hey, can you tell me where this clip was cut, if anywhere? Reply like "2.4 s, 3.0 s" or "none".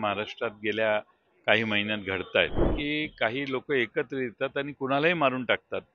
2.7 s